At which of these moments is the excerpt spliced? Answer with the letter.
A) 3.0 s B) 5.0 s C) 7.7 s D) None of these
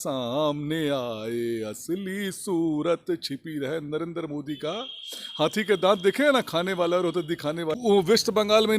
C